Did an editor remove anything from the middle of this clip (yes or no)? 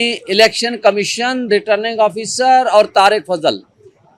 no